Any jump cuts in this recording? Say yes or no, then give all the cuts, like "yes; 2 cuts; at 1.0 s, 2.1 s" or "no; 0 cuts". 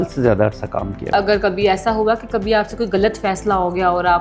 yes; 1 cut; at 1.1 s